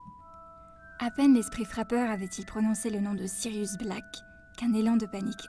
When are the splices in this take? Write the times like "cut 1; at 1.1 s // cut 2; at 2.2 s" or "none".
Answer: cut 1; at 0.9 s